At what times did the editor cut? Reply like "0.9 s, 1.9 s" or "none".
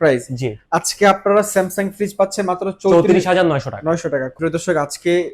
4.3 s